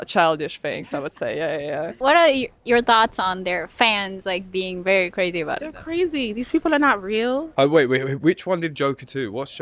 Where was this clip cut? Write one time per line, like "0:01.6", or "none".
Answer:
0:02.0
0:07.5